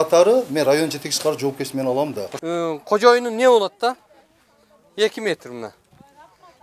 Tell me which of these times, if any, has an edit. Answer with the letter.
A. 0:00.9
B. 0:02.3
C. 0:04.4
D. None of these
B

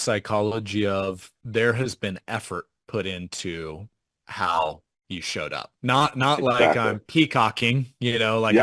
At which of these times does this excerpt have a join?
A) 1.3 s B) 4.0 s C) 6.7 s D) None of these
A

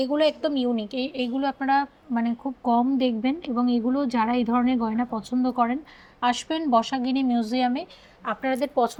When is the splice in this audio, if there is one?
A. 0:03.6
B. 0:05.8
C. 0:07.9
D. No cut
D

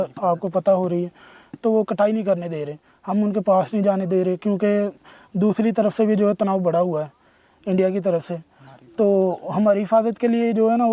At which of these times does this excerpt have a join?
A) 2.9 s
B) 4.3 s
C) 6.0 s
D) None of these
D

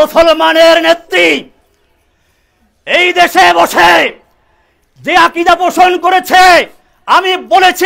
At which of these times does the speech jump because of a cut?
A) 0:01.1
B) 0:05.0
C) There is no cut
C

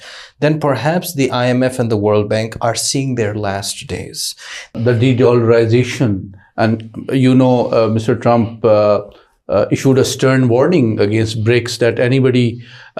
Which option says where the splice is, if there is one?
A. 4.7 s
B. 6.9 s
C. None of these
A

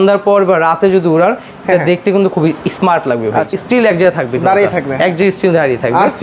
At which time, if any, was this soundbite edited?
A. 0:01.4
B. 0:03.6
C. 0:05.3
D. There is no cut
B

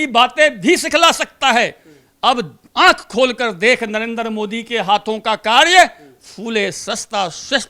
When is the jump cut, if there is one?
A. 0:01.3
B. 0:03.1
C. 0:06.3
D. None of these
D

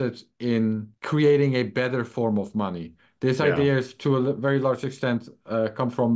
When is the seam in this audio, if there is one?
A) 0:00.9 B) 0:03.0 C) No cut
A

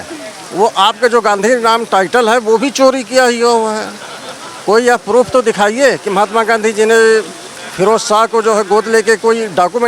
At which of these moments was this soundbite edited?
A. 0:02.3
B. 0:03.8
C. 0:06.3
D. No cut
D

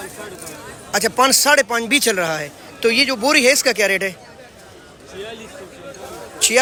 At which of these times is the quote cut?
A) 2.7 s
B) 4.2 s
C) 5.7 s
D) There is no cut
D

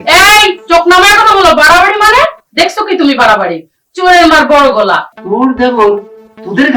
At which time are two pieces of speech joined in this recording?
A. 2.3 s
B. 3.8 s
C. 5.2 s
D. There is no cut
C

